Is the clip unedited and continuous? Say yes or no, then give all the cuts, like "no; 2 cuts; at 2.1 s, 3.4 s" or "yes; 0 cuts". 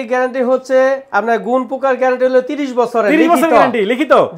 yes; 0 cuts